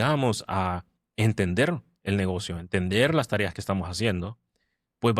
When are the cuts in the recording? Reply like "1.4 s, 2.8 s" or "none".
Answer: none